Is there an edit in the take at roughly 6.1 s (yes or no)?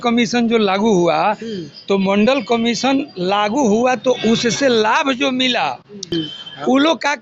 yes